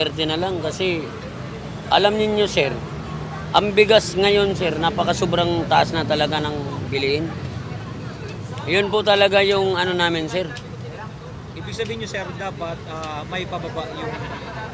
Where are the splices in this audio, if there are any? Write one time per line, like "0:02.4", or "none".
none